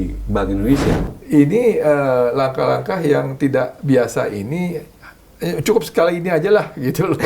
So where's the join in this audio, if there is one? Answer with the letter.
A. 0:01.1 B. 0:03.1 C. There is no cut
A